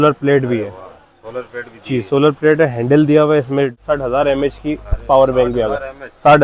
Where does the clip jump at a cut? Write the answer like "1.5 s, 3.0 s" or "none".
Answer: 3.8 s